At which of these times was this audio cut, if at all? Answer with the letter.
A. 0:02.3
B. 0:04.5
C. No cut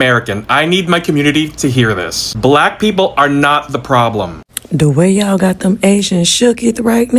B